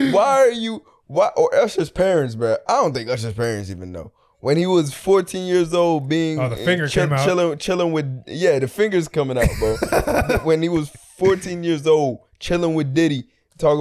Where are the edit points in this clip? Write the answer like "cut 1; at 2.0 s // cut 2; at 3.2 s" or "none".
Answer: none